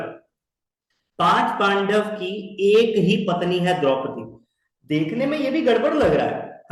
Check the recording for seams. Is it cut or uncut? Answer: uncut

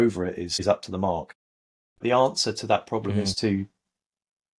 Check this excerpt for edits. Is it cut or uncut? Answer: cut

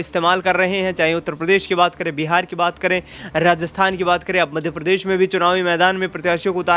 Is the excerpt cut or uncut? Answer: uncut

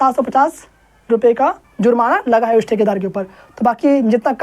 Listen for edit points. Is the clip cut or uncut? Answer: cut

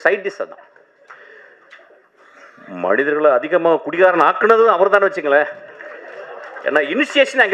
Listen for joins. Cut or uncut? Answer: uncut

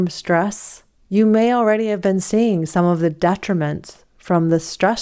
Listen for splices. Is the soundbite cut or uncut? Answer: uncut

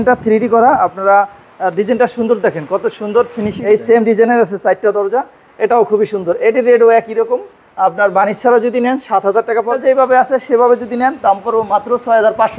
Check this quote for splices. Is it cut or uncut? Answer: cut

